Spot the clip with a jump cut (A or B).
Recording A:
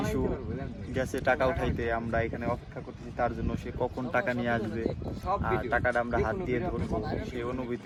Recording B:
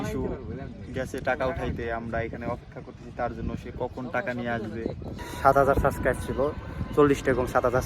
B